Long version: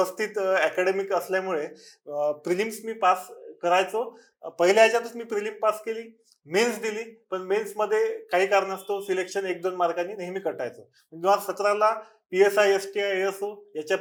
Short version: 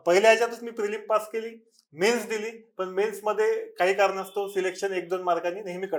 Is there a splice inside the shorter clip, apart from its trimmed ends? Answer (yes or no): no